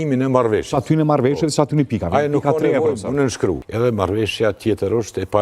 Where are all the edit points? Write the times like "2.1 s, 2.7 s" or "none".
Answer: 3.7 s